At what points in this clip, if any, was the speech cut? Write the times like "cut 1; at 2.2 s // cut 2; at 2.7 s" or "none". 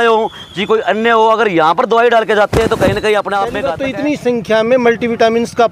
cut 1; at 3.7 s